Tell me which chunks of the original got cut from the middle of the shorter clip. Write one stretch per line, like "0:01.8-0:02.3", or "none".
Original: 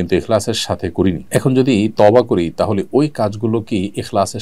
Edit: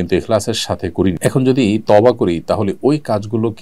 0:01.2-0:01.3